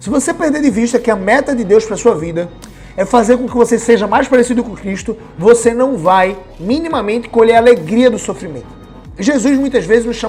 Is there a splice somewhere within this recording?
no; 0 cuts

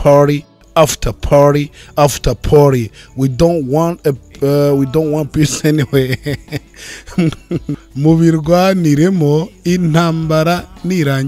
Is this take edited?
no; 0 cuts

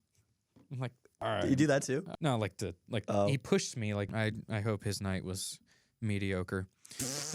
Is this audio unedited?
no; 3 cuts; at 1.1 s, 2.1 s, 4.1 s

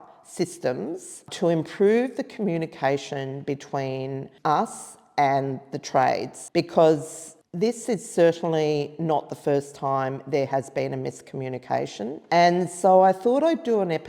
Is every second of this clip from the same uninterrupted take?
no; 4 cuts; at 1.3 s, 4.3 s, 6.3 s, 12.2 s

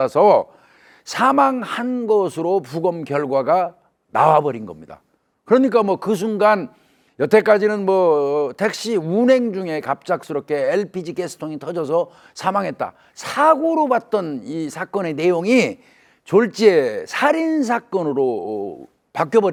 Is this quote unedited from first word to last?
yes; 0 cuts

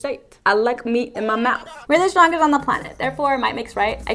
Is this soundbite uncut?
no; 1 cut; at 1.7 s

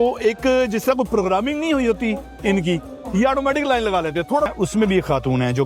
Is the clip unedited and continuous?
no; 1 cut; at 4.5 s

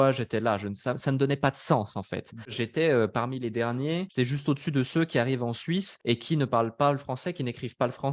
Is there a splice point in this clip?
yes; 3 cuts; at 2.6 s, 4.1 s, 5.9 s

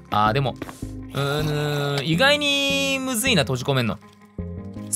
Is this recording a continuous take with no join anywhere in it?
yes; 0 cuts

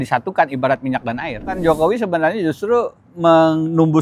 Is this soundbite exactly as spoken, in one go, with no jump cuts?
no; 1 cut; at 1.6 s

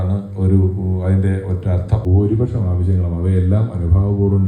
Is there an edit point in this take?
yes; 1 cut; at 2.1 s

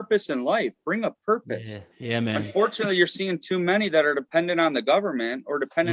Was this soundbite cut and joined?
no; 0 cuts

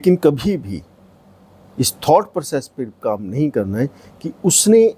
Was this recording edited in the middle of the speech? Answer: no; 0 cuts

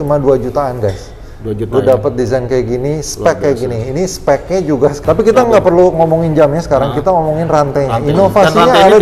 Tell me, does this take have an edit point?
yes; 1 cut; at 5.0 s

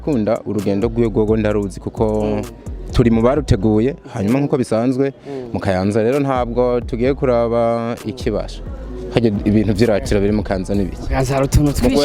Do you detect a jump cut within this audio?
no; 0 cuts

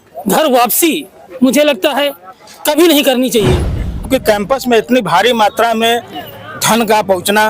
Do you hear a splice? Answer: yes; 1 cut; at 4.1 s

